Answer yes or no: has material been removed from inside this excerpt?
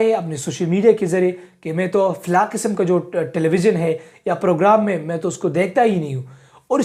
no